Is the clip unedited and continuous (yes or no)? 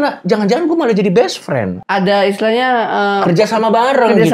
no